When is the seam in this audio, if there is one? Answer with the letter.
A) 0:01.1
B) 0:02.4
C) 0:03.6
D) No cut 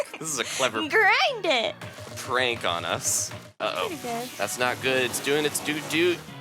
C